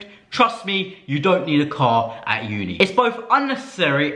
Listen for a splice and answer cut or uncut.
cut